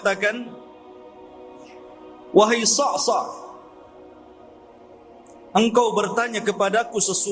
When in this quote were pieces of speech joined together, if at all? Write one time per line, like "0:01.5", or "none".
0:00.9
0:02.3
0:03.6
0:05.5